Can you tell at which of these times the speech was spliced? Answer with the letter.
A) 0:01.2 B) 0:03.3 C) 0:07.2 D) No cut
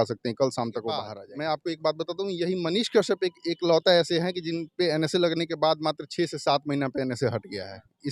A